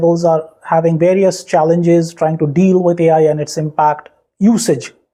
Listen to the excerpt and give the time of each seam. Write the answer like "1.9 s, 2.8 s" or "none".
none